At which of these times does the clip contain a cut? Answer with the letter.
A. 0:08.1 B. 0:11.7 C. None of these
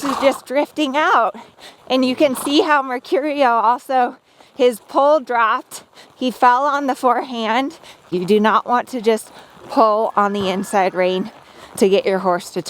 A